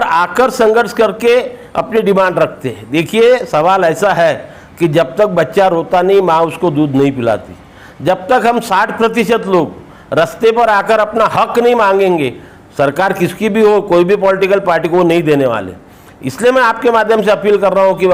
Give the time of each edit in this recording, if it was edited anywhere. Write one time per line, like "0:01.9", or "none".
none